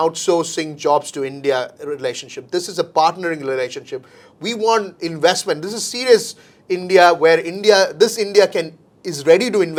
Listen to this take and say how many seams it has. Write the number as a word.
zero